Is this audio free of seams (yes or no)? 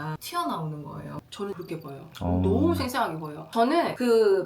no